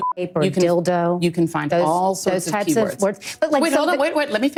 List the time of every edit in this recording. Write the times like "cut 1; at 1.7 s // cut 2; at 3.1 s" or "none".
none